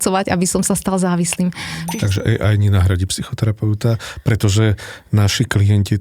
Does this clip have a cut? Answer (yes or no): yes